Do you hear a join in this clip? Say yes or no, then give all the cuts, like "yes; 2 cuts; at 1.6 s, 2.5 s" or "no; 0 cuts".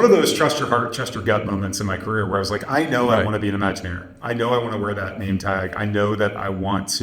no; 0 cuts